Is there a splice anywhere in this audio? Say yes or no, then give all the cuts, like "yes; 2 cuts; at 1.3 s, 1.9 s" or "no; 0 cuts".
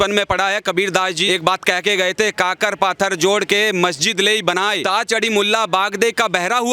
yes; 2 cuts; at 1.2 s, 4.8 s